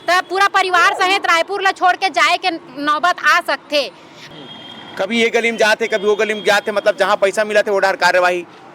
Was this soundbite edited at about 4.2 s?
yes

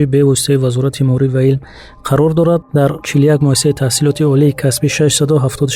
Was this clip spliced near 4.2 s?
no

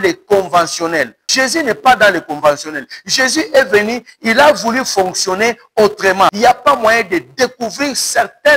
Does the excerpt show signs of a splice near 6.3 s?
yes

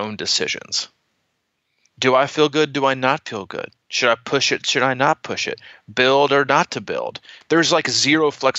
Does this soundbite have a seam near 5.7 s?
no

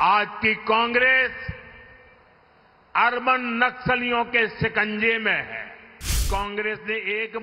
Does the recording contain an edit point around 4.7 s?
no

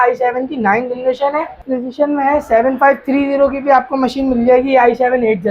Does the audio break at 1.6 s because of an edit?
yes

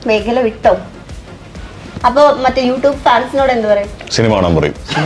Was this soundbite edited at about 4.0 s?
yes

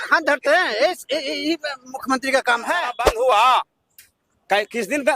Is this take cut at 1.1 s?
no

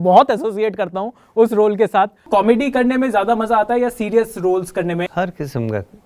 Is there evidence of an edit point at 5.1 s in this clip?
yes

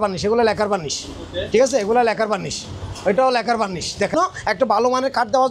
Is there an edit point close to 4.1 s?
yes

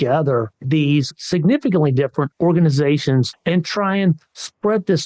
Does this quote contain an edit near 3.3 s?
yes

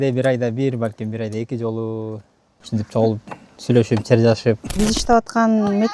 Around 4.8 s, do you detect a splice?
yes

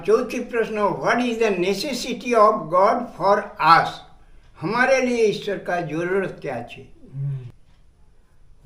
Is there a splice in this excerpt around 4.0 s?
no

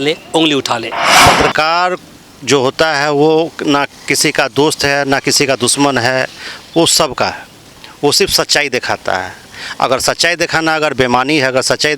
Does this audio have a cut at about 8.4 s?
no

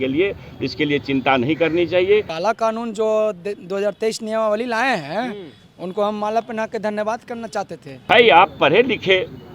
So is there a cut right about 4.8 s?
no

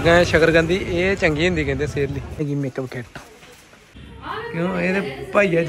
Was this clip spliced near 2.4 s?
yes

